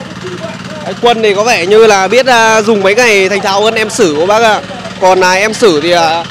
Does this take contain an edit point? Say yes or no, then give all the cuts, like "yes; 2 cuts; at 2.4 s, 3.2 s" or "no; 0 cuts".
no; 0 cuts